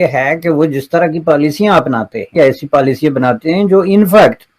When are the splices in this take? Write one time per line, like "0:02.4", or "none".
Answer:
0:02.3